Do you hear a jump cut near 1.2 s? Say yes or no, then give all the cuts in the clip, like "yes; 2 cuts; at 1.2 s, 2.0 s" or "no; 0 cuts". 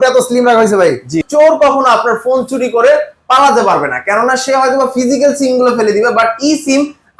yes; 1 cut; at 1.2 s